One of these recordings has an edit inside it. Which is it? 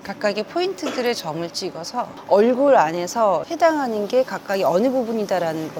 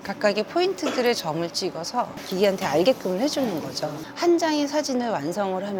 second; 2 cuts; at 2.2 s, 4.0 s

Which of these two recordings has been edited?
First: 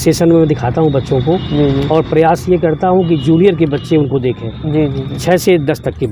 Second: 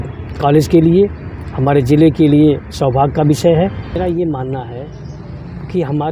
second; 1 cut; at 4.0 s

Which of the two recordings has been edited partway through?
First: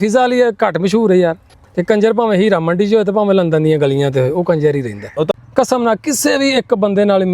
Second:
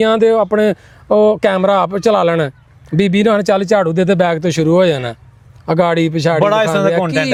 first; 2 cuts; at 1.6 s, 5.3 s

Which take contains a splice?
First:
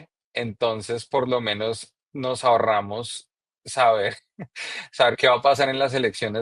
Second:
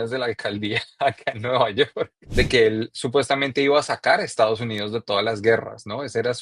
second; 1 cut; at 2.2 s

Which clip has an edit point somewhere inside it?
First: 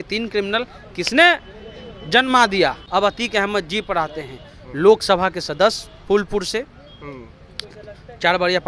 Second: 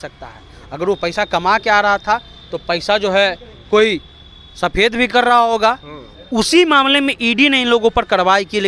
first; 1 cut; at 2.8 s

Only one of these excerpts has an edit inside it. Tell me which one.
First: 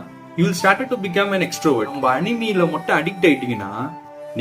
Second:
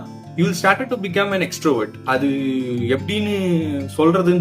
first; 1 cut; at 2.0 s

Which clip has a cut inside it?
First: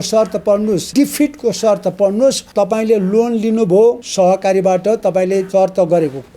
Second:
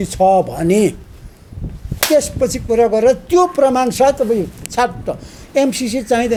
first; 4 cuts; at 0.9 s, 2.4 s, 4.0 s, 5.5 s

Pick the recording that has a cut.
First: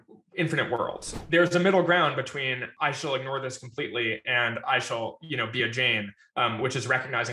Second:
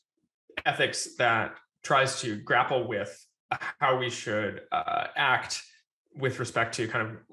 first; 2 cuts; at 1.1 s, 2.7 s

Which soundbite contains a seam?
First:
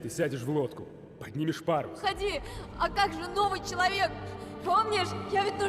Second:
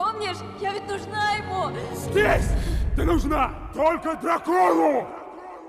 first; 1 cut; at 2.0 s

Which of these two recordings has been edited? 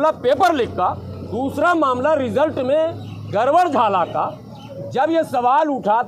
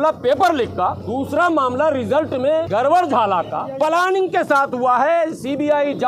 second; 3 cuts; at 1.0 s, 2.7 s, 3.6 s

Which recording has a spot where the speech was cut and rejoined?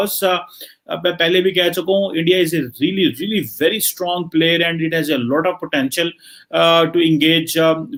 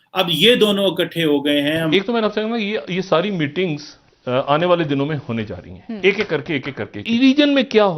second; 2 cuts; at 1.9 s, 7.0 s

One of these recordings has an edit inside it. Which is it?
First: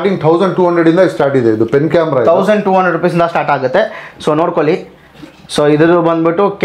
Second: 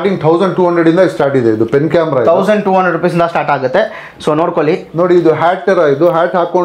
second; 1 cut; at 4.9 s

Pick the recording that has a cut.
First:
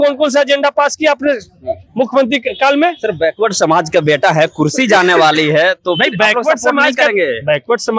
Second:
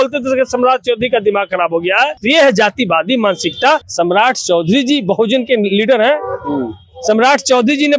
second; 2 cuts; at 2.2 s, 3.9 s

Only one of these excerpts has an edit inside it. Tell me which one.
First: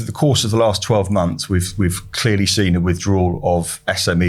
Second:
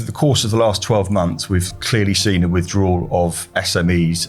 second; 1 cut; at 1.7 s

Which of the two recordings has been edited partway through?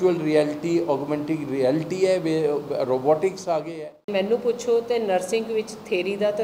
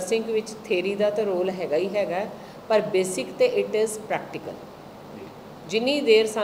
first; 1 cut; at 4.1 s

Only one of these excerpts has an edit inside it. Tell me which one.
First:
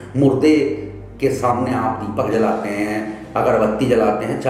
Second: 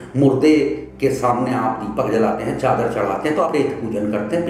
second; 3 cuts; at 0.9 s, 2.4 s, 3.5 s

